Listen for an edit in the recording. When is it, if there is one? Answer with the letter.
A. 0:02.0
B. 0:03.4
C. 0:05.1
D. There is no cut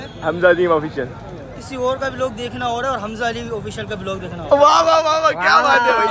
D